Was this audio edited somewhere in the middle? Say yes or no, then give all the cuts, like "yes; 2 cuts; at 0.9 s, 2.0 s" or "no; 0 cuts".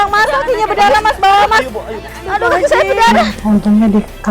yes; 1 cut; at 3.3 s